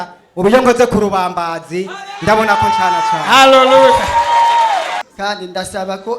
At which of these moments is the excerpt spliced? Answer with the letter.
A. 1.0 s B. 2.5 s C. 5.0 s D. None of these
C